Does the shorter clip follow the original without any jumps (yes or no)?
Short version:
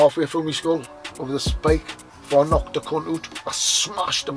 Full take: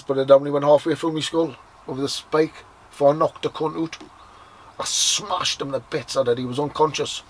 no